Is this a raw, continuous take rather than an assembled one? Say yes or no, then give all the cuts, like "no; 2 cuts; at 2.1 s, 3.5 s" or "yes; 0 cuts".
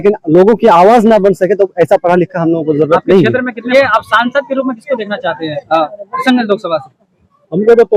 no; 1 cut; at 3.6 s